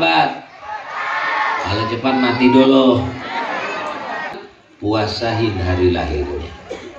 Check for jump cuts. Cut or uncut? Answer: cut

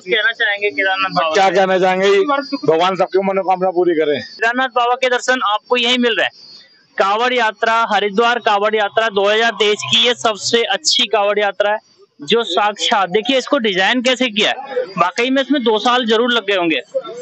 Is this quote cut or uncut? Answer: cut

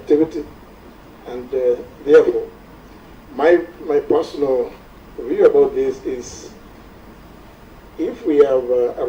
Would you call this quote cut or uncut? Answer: cut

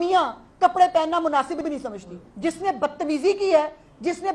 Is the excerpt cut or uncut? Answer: cut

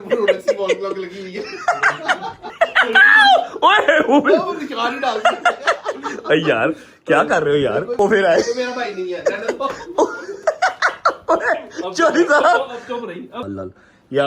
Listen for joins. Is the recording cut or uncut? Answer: cut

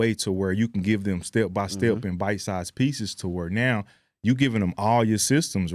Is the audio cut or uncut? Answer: uncut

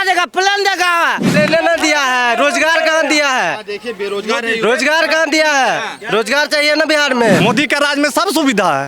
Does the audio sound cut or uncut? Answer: cut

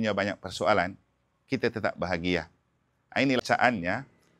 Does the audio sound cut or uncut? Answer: cut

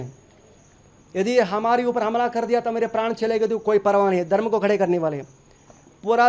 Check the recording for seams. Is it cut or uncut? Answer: uncut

